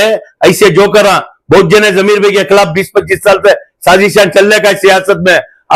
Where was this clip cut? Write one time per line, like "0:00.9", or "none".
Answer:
none